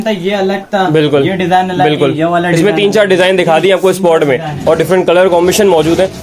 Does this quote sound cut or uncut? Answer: uncut